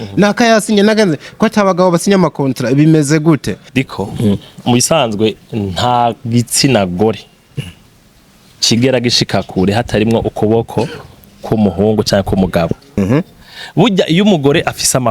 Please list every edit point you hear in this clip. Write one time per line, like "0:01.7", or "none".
0:03.6
0:13.0

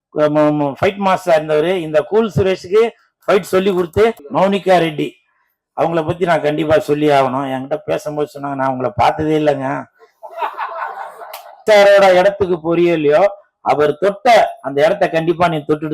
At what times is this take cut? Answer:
0:04.2
0:11.6

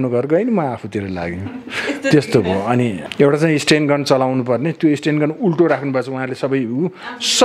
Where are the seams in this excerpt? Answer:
0:03.0

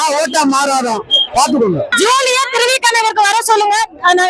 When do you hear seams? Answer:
0:01.9

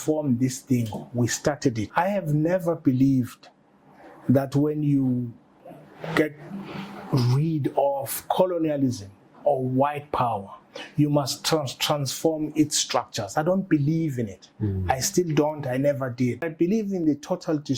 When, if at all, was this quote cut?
0:01.8
0:16.5

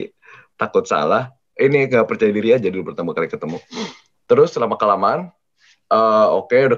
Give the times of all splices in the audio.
none

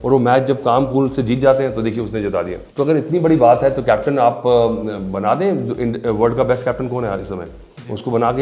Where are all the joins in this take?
0:02.6

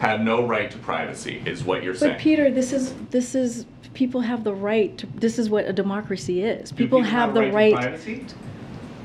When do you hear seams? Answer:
none

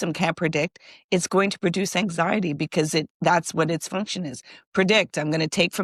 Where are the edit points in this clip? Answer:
none

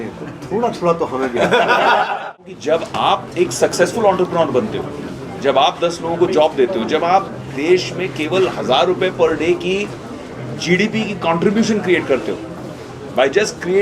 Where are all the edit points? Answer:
0:02.4

